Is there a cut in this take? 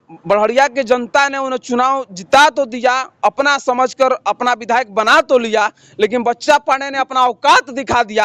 no; 0 cuts

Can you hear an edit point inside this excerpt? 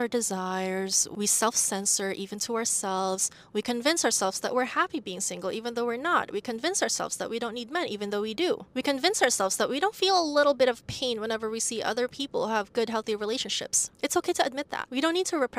no; 0 cuts

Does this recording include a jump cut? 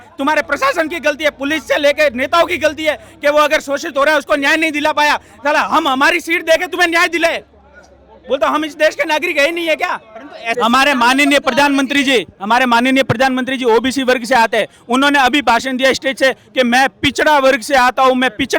yes; 1 cut; at 10.4 s

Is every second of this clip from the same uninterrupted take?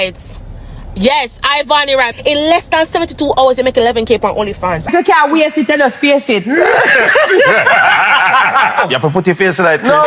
no; 2 cuts; at 2.1 s, 4.9 s

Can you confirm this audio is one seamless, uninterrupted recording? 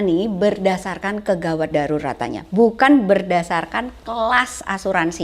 yes; 0 cuts

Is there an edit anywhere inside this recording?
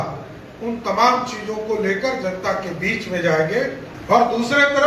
yes; 1 cut; at 3.9 s

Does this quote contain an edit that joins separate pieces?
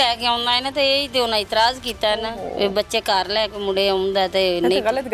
no; 0 cuts

